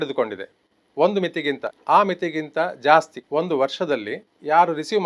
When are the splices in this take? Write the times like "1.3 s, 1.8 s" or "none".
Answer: 1.7 s, 3.2 s